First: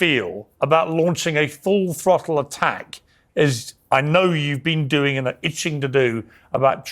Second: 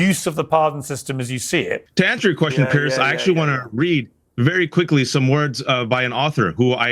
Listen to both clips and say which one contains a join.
second; 1 cut; at 1.8 s

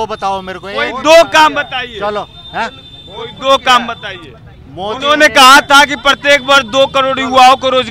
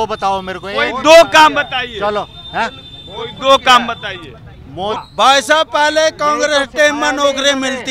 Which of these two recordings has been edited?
second; 1 cut; at 5.0 s

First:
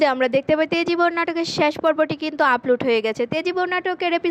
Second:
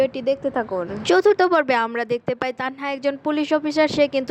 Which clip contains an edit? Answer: second; 1 cut; at 0.9 s

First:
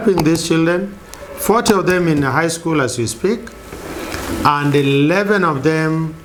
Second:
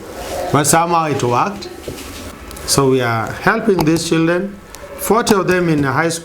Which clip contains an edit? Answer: second; 1 cut; at 2.4 s

